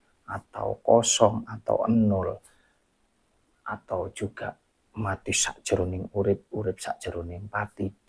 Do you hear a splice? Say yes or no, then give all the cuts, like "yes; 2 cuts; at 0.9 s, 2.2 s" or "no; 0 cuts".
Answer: no; 0 cuts